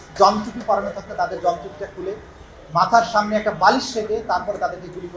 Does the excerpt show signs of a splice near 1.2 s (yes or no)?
no